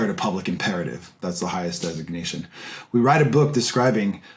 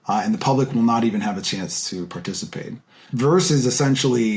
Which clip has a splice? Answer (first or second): second